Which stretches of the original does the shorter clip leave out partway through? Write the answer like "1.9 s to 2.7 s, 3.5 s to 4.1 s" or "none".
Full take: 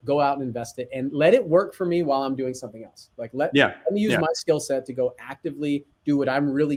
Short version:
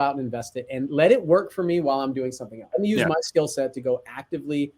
2.9 s to 3.8 s

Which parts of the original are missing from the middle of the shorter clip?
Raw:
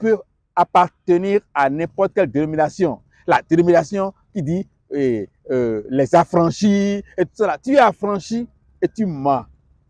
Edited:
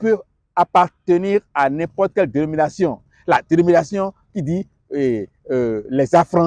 none

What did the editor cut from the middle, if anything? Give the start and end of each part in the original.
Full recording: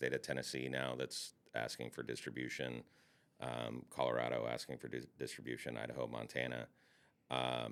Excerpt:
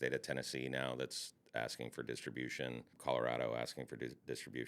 2.9 s to 3.9 s

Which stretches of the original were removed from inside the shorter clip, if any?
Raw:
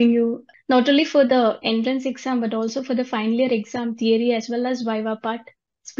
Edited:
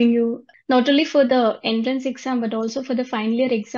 none

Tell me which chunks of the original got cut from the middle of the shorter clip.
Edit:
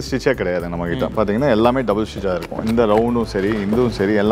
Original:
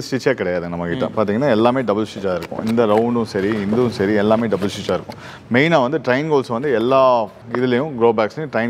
none

